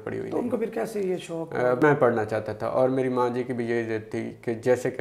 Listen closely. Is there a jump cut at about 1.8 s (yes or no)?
yes